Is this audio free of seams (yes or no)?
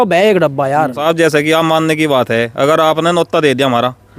no